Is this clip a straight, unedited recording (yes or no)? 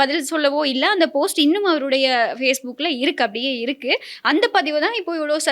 yes